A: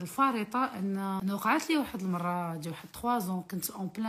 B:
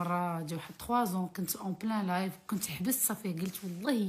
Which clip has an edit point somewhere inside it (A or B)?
A